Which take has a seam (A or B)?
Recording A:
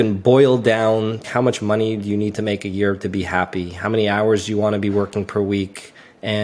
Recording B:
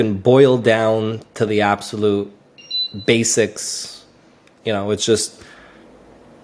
A